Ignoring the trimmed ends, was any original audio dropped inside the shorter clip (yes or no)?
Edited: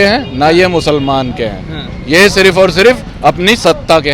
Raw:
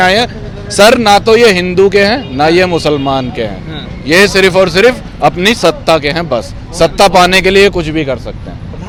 no